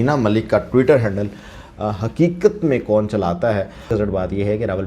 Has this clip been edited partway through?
yes; 1 cut; at 3.9 s

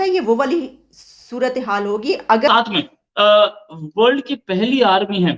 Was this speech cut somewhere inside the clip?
yes; 1 cut; at 2.5 s

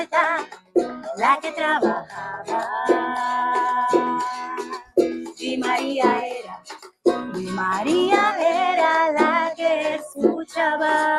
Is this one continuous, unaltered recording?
yes; 0 cuts

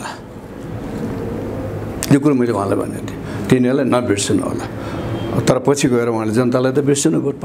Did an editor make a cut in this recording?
no; 0 cuts

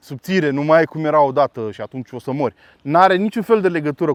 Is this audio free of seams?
yes; 0 cuts

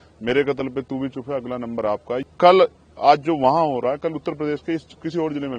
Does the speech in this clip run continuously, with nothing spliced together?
no; 1 cut; at 2.2 s

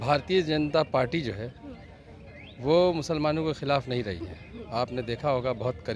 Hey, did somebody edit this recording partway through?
no; 0 cuts

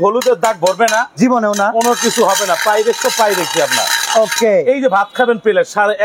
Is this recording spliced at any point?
no; 0 cuts

